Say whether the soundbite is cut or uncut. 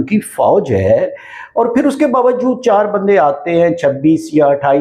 uncut